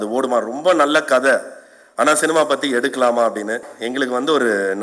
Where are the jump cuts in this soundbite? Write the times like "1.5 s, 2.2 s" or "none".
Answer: 3.7 s